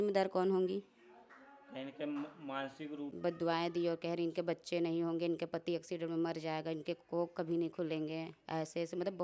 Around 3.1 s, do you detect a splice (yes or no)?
yes